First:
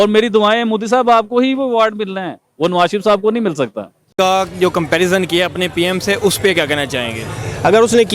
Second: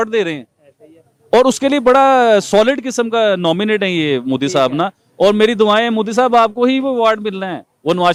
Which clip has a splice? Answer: first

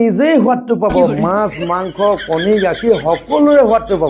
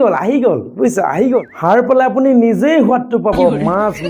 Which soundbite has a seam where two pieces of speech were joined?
second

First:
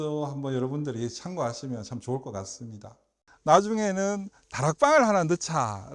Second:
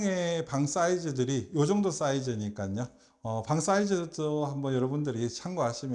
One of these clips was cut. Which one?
first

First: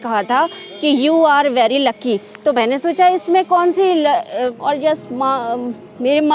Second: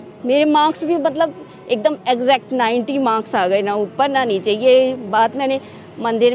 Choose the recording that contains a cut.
first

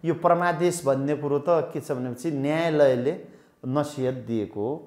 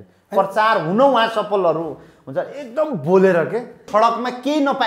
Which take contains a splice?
second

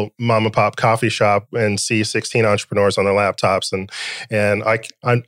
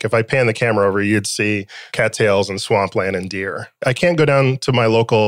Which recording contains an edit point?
second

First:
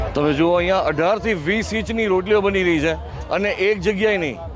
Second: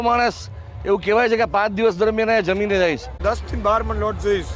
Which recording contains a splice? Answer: second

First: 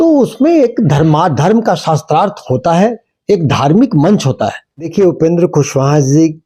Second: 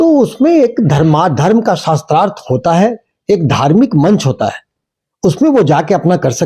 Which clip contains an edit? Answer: first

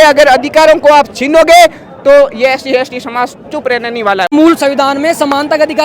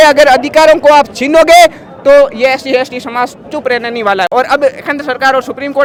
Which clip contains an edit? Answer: first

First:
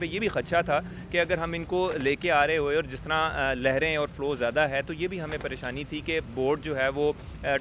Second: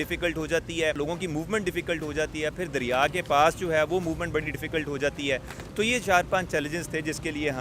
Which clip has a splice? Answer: second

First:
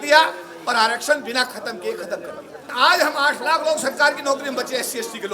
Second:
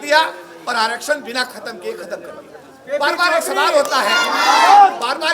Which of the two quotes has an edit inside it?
first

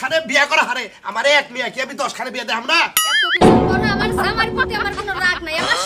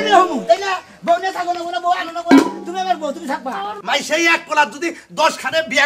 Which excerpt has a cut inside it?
second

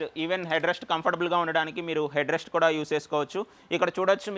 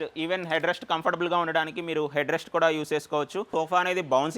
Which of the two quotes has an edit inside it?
second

